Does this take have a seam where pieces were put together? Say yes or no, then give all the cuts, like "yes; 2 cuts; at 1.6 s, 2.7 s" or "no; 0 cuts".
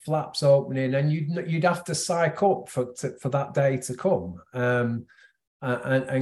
no; 0 cuts